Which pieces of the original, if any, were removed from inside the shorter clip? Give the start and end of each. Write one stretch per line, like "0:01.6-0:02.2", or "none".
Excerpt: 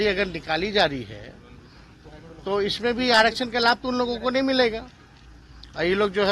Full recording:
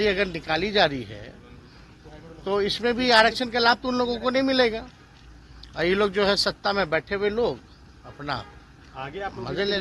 none